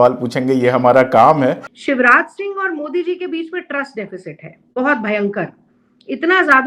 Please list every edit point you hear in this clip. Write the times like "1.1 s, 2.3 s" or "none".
1.6 s